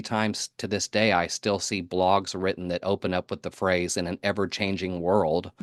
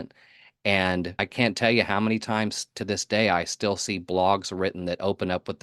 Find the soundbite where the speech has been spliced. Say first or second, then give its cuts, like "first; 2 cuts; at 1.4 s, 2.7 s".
second; 1 cut; at 1.2 s